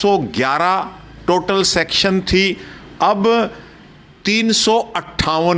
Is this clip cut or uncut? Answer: uncut